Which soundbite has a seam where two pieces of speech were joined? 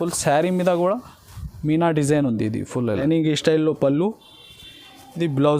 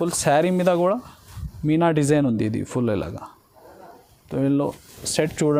first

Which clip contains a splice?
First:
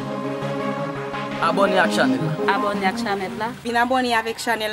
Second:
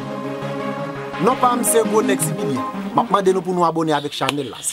second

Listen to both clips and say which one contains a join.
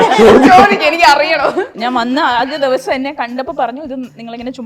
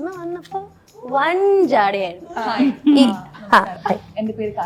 first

